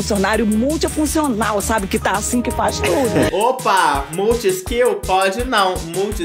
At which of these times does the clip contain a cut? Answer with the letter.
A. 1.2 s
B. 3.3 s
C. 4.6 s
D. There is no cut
B